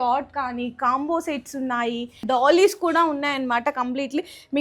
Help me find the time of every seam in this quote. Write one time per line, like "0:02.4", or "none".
0:02.2